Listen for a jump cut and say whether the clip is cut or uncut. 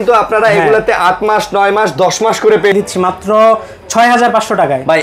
cut